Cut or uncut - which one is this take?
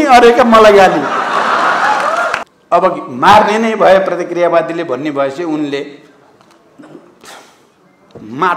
cut